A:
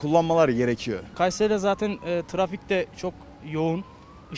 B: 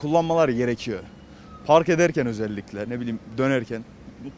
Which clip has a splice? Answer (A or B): A